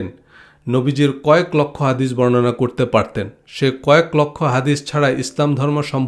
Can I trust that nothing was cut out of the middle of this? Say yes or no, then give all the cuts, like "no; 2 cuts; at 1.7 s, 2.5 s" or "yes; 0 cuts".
yes; 0 cuts